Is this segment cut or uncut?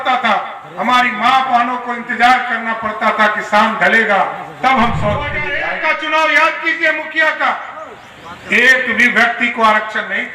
cut